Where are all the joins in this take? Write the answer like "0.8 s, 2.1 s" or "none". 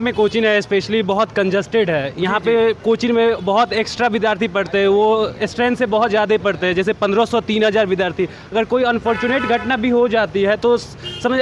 2.8 s